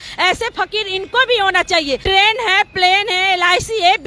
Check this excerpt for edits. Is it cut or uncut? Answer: cut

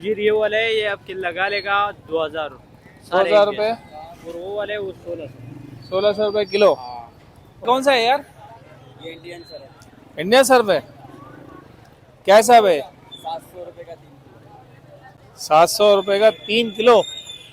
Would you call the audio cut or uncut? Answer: cut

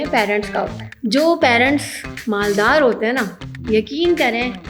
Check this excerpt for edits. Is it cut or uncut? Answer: uncut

